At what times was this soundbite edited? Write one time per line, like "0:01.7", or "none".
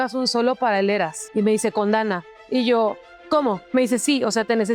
0:01.2
0:03.6